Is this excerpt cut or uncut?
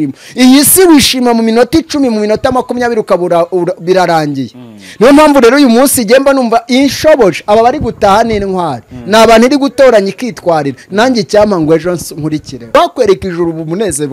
cut